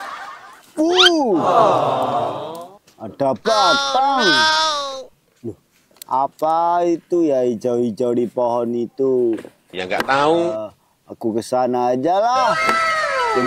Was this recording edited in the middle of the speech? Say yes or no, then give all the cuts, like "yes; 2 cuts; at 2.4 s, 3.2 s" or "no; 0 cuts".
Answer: no; 0 cuts